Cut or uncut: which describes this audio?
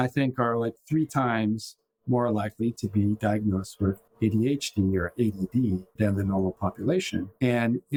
uncut